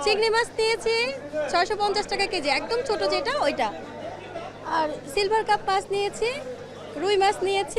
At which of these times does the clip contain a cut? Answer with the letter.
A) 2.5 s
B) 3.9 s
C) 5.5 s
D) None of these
D